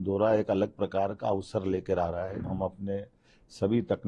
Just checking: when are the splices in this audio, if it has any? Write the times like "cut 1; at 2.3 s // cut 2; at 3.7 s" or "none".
cut 1; at 2.4 s